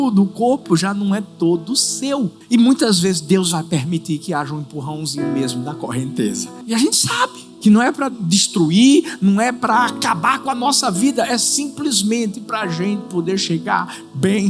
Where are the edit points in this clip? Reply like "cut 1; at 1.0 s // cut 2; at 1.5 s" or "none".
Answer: cut 1; at 2.4 s // cut 2; at 6.5 s // cut 3; at 7.4 s